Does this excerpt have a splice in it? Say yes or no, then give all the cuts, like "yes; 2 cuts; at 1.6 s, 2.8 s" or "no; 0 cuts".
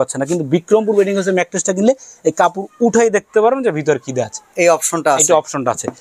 no; 0 cuts